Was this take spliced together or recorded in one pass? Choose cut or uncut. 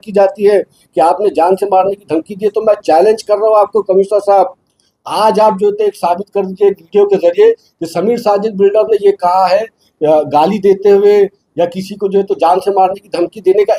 uncut